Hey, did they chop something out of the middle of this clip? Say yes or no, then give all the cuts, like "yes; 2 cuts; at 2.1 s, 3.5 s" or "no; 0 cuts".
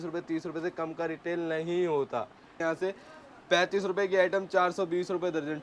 yes; 1 cut; at 2.6 s